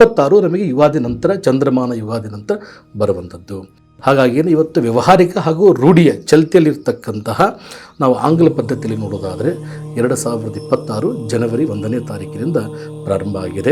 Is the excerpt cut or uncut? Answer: uncut